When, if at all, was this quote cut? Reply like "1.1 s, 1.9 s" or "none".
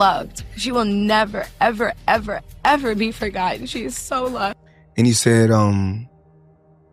4.6 s